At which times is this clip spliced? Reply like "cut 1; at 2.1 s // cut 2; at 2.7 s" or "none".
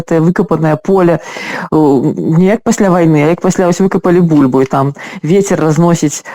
none